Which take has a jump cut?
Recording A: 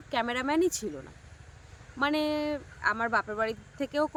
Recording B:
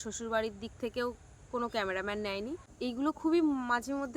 B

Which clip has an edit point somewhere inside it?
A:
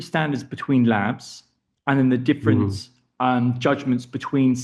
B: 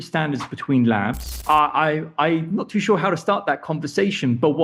B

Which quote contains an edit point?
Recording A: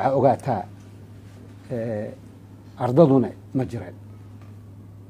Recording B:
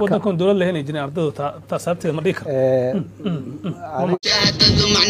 B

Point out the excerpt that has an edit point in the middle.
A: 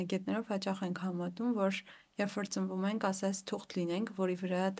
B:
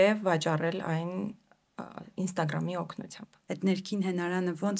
B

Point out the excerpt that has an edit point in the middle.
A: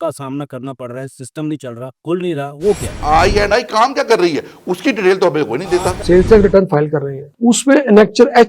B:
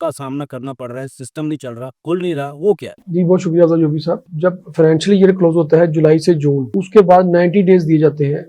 A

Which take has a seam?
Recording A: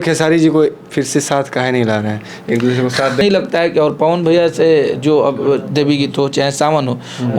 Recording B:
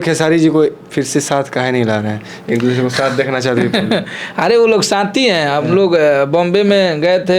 A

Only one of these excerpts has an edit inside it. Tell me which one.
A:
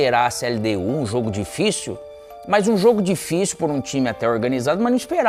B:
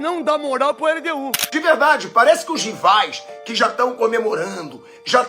B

